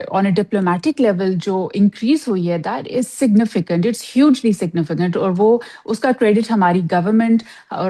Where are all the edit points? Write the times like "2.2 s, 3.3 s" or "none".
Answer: none